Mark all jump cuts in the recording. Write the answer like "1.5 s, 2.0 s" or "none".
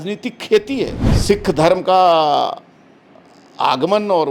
1.1 s